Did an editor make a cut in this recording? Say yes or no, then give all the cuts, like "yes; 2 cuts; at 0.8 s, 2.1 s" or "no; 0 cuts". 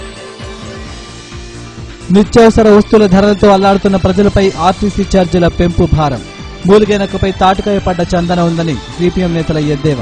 no; 0 cuts